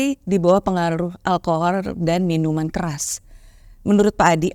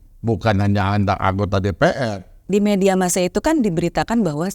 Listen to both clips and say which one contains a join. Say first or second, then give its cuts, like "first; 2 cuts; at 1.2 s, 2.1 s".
second; 1 cut; at 2.3 s